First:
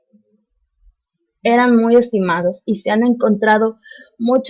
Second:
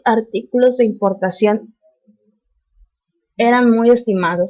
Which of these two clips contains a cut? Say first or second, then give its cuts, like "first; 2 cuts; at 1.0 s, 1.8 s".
second; 1 cut; at 0.9 s